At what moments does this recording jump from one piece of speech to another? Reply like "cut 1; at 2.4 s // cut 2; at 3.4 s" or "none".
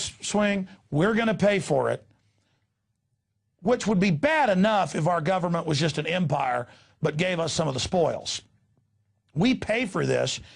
cut 1; at 9.6 s